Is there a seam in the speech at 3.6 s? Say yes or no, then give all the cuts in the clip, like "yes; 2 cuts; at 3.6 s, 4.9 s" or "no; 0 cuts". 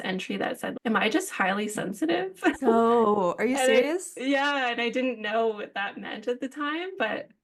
no; 0 cuts